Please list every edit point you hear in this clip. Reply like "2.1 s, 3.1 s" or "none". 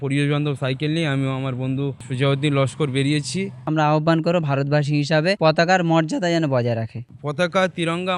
2.0 s, 3.6 s, 5.4 s, 7.0 s